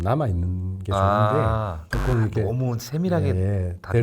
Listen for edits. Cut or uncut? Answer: cut